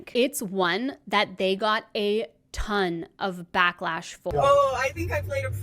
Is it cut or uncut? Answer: cut